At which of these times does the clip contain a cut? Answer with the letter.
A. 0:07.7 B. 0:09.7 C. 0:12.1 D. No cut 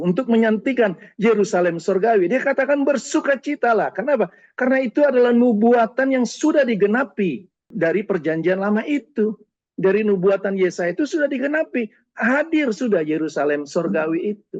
A